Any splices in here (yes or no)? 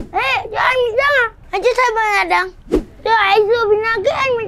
no